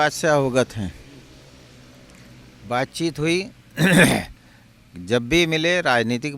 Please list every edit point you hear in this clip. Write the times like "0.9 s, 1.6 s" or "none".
none